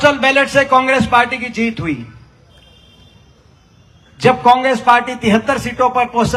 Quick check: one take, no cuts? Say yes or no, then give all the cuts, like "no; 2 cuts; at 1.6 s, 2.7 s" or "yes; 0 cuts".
yes; 0 cuts